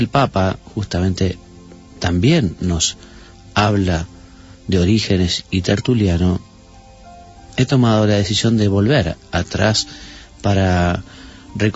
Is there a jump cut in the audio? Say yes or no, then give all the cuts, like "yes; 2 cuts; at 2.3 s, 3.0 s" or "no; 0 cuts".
no; 0 cuts